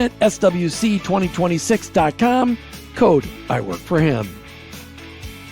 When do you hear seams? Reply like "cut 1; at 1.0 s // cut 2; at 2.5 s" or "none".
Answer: cut 1; at 4.4 s